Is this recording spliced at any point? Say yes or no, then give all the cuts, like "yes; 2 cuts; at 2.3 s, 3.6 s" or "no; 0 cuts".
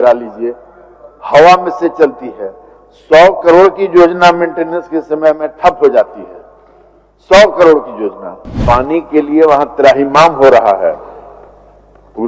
yes; 1 cut; at 8.6 s